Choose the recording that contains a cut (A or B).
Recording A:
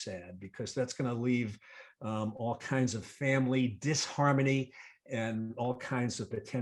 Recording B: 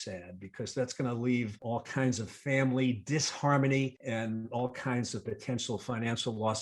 B